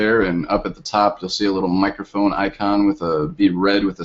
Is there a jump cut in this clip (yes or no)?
yes